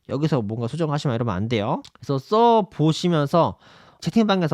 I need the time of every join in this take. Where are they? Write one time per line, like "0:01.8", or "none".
none